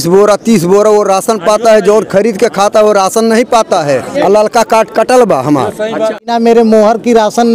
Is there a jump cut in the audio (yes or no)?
yes